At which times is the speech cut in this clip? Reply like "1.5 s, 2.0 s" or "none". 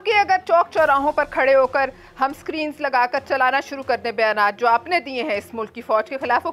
none